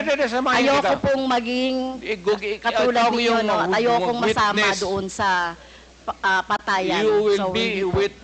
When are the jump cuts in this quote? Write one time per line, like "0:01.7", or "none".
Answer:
none